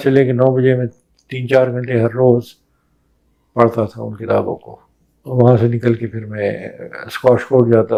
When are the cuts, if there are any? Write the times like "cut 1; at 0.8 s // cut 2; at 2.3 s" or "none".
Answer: none